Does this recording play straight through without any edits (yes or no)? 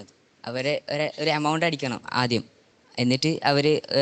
yes